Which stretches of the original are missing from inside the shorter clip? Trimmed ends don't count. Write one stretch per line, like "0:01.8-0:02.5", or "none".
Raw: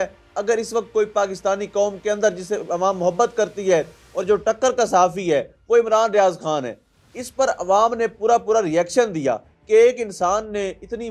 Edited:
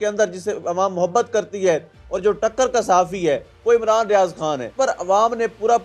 0:06.7-0:07.3